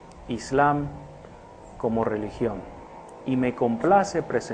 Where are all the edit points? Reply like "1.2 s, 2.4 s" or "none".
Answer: 3.5 s